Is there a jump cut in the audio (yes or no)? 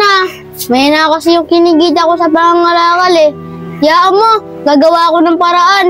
no